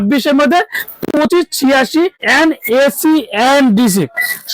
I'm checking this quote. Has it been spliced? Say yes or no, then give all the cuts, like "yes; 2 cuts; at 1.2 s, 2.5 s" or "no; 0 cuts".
yes; 1 cut; at 2.2 s